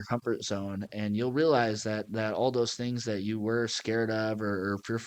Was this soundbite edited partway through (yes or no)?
no